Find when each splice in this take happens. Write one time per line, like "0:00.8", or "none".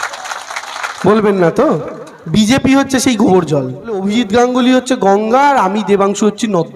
0:04.0